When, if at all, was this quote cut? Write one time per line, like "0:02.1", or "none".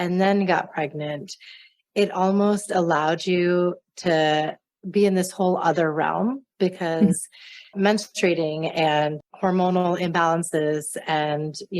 0:09.2